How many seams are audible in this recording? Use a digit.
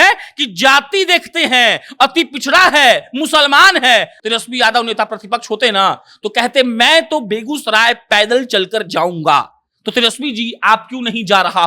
1